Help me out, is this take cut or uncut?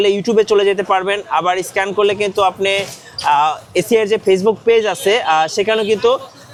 uncut